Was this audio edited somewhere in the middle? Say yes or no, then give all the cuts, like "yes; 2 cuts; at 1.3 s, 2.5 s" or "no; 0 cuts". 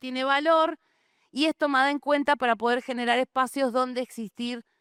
no; 0 cuts